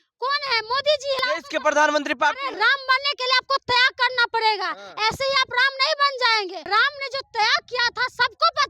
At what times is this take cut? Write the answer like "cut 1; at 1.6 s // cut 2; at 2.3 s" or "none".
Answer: cut 1; at 1.2 s // cut 2; at 2.5 s // cut 3; at 6.6 s